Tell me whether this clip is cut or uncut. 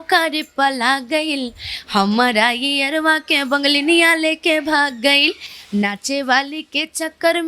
uncut